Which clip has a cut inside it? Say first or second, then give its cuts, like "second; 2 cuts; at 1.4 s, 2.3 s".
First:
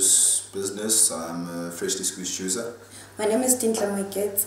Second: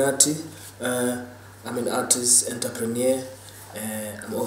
first; 1 cut; at 3.4 s